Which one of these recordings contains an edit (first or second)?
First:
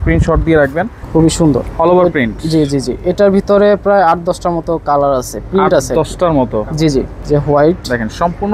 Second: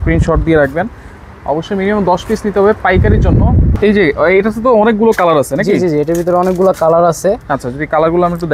first